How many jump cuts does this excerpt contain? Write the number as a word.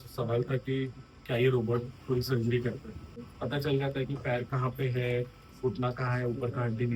one